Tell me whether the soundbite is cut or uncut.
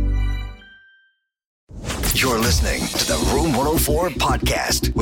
cut